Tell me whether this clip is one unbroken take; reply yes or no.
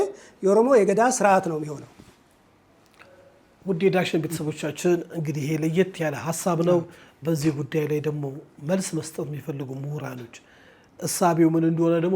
yes